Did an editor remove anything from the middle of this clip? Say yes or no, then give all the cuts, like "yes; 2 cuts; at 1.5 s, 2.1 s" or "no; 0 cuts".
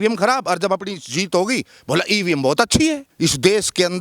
yes; 1 cut; at 3.1 s